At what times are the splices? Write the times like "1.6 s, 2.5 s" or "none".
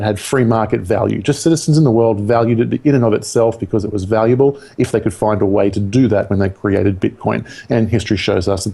none